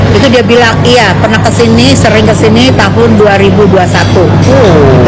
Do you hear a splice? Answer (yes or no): no